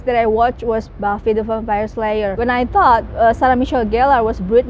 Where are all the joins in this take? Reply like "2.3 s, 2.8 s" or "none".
2.3 s